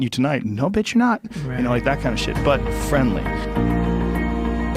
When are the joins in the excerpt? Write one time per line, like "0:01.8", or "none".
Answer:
0:03.3